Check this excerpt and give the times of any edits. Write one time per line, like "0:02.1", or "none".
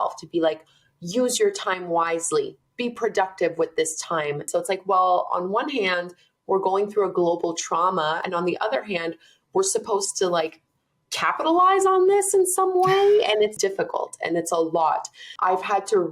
0:04.5
0:08.2
0:13.5

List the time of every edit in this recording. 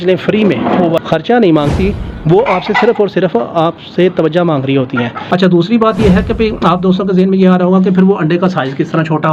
0:01.0
0:05.2

